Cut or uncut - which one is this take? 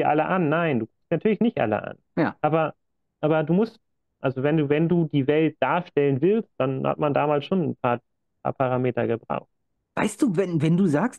uncut